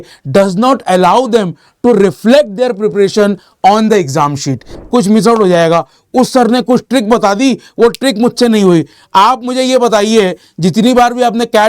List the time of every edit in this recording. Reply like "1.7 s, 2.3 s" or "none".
4.8 s